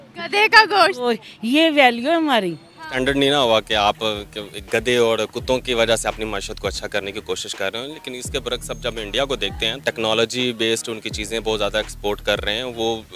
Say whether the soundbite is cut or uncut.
cut